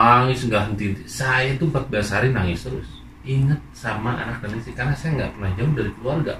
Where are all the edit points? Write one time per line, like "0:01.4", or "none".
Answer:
none